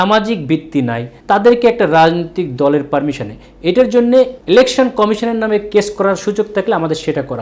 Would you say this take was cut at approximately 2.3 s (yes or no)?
no